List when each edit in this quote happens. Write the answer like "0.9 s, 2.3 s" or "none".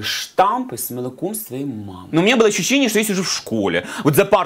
2.0 s